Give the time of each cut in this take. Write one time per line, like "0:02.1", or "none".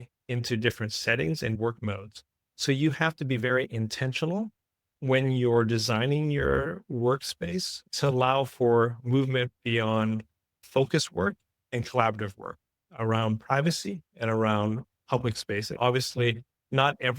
0:15.6